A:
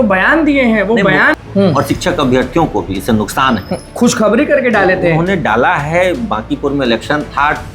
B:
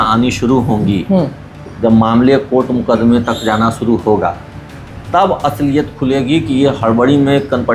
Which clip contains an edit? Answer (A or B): A